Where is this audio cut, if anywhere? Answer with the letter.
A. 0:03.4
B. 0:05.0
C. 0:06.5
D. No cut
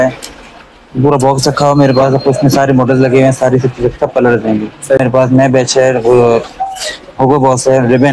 B